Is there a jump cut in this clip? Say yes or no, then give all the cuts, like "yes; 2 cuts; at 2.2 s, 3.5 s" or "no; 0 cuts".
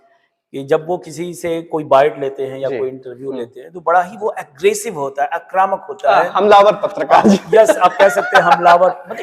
no; 0 cuts